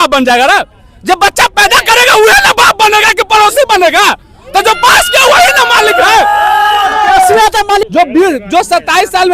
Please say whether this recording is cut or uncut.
cut